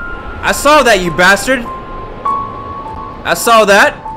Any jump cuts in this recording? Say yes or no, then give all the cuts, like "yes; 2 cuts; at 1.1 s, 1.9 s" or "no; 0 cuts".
no; 0 cuts